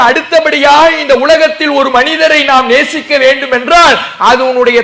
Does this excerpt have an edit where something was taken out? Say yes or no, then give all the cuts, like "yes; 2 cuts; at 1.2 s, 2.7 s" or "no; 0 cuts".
no; 0 cuts